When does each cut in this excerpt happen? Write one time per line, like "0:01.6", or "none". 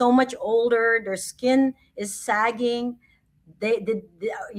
none